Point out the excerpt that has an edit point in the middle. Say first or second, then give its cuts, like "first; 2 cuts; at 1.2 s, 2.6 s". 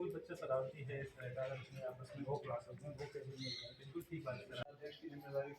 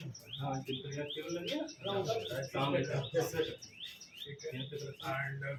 first; 1 cut; at 4.7 s